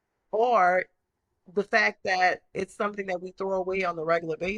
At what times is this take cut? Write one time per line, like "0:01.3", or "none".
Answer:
none